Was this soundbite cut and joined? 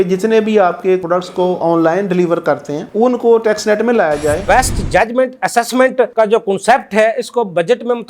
yes; 2 cuts; at 1.0 s, 4.4 s

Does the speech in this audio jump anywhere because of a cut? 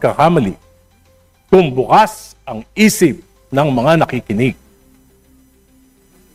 no; 0 cuts

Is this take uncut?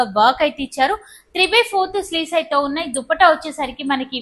yes; 0 cuts

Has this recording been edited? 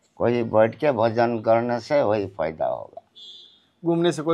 no; 0 cuts

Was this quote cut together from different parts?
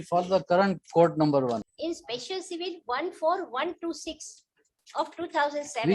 yes; 1 cut; at 1.7 s

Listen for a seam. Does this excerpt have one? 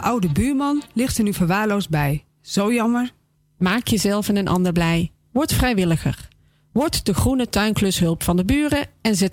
no; 0 cuts

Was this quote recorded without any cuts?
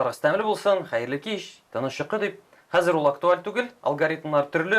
yes; 0 cuts

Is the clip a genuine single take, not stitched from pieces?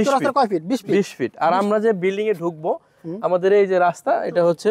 yes; 0 cuts

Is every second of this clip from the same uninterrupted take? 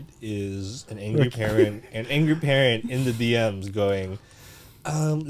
yes; 0 cuts

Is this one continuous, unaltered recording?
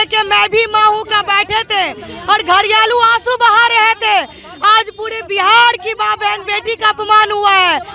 yes; 0 cuts

